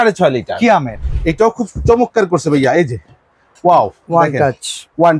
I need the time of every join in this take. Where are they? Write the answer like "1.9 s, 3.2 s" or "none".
1.0 s